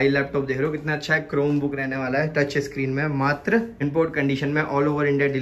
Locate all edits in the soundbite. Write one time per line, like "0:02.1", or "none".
0:03.7